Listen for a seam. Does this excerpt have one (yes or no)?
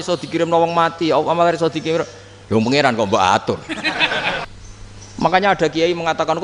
yes